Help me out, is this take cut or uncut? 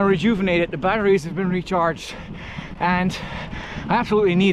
uncut